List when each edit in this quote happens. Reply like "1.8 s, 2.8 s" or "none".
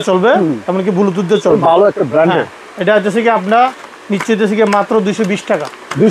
none